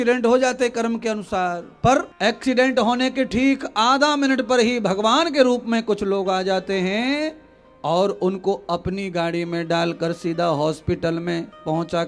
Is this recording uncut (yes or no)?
no